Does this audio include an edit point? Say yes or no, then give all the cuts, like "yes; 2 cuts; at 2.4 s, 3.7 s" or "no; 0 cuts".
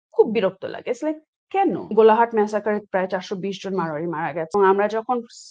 yes; 2 cuts; at 1.8 s, 4.5 s